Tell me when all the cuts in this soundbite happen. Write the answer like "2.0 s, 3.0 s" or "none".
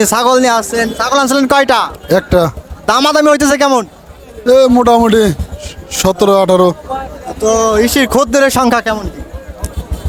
none